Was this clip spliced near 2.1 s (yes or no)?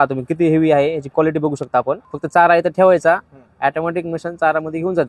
yes